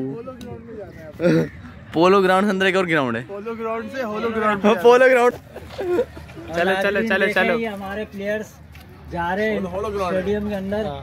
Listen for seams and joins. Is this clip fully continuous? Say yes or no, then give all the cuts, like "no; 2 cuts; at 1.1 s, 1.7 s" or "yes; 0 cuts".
no; 1 cut; at 5.9 s